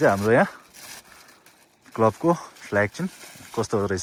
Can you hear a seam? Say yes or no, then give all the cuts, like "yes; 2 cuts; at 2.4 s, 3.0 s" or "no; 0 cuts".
no; 0 cuts